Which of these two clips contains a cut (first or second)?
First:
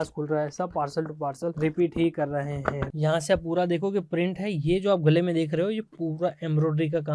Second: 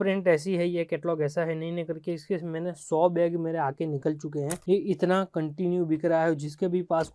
first